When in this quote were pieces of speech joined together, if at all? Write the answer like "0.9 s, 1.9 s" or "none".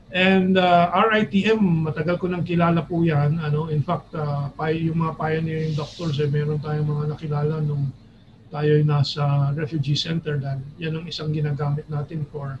none

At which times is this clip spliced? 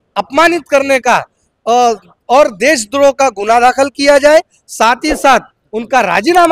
none

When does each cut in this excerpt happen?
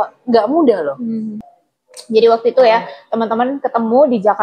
1.4 s

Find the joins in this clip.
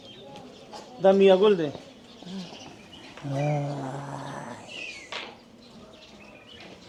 none

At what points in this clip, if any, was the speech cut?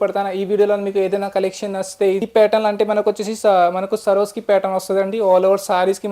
2.3 s

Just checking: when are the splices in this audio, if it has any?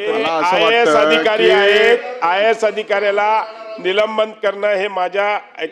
none

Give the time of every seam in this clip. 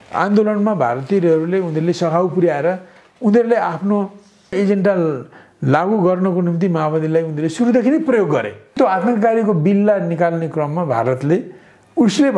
4.5 s, 8.8 s

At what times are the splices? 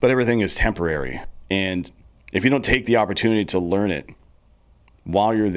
1.2 s

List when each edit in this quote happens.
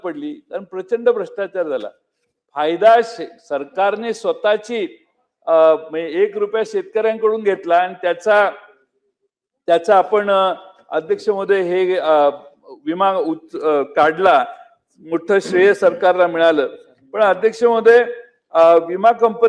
none

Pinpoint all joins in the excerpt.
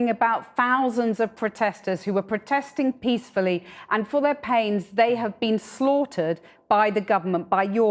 none

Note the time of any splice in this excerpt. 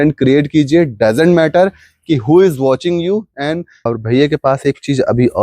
3.8 s

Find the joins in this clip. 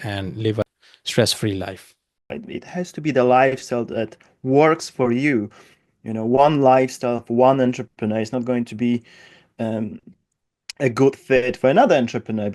2.3 s

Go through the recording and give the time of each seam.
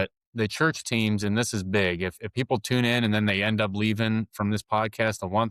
none

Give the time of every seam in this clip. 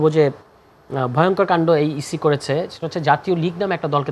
none

